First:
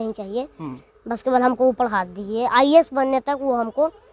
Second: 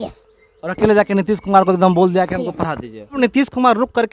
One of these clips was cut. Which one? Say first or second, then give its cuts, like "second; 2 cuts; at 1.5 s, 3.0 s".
second; 1 cut; at 3.2 s